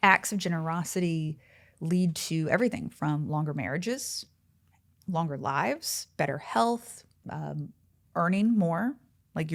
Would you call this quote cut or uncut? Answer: uncut